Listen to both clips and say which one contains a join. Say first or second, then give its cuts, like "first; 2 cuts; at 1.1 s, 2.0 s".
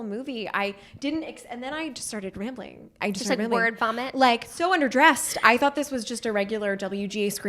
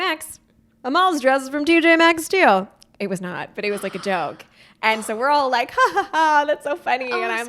first; 2 cuts; at 3.0 s, 4.5 s